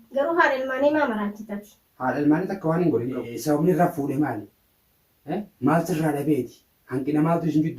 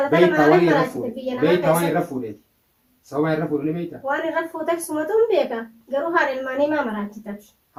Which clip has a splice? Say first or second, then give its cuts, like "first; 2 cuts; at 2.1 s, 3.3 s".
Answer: first; 1 cut; at 3.3 s